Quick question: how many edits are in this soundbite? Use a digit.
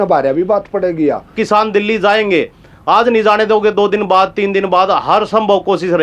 1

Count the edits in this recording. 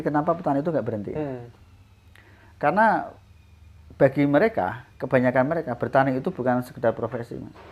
0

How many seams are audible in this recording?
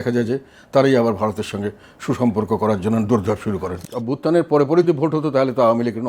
2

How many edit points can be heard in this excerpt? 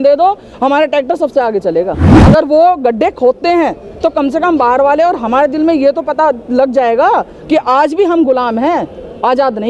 1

